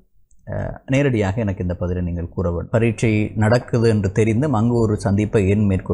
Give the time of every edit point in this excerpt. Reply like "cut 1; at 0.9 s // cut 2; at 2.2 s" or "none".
cut 1; at 2.7 s